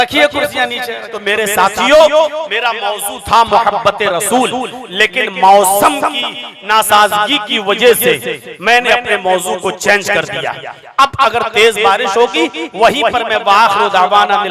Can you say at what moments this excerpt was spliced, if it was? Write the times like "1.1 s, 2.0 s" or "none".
1.3 s